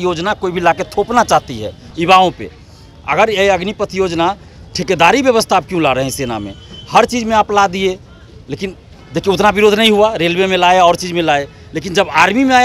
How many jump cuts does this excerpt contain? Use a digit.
0